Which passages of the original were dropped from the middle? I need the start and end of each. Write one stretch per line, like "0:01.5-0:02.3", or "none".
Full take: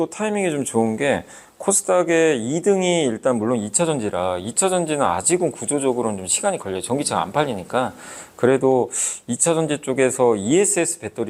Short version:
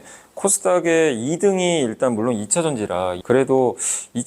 0:04.4-0:08.3